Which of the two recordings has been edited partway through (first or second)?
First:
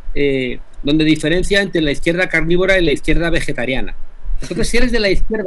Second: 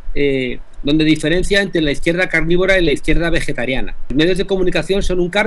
second